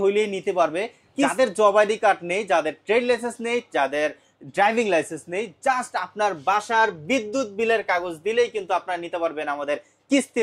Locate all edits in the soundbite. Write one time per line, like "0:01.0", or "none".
0:01.3